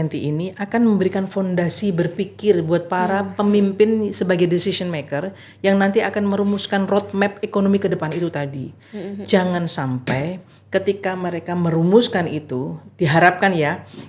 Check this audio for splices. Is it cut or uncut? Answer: uncut